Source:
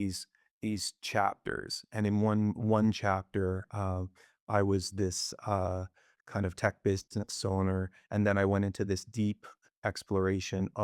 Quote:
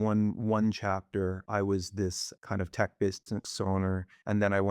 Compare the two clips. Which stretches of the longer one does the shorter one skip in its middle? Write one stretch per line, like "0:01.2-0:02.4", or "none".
0:03.6-0:04.4
0:05.3-0:06.1